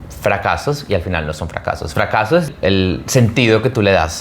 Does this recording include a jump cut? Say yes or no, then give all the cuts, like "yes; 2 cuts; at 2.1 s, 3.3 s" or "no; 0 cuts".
yes; 1 cut; at 2.5 s